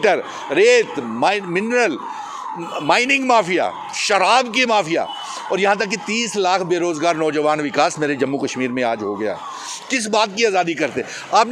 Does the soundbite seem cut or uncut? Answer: uncut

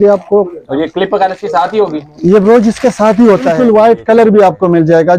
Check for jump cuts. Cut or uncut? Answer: cut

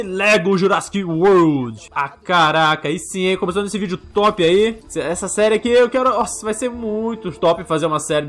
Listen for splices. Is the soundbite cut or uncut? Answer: cut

